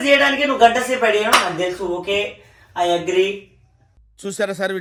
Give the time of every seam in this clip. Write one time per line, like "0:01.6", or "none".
none

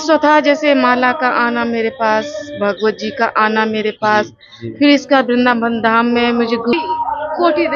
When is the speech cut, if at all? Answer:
0:06.7

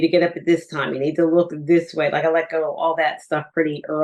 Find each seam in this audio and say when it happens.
none

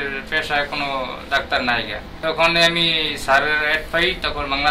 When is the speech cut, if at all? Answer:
0:02.1

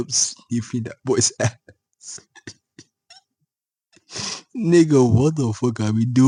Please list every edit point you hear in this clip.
none

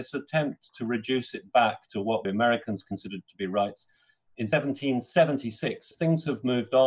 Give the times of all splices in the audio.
0:02.2
0:04.5
0:05.9

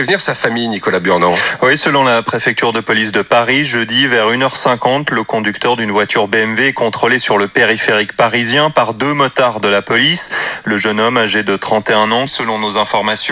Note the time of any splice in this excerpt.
0:12.3

